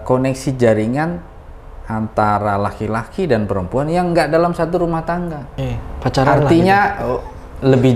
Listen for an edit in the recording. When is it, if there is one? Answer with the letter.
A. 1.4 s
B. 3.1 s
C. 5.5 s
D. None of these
C